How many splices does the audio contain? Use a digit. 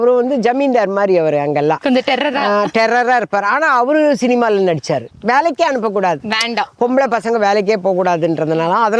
1